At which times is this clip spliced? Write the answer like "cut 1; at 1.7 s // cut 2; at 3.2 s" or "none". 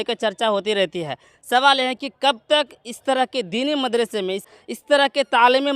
cut 1; at 4.4 s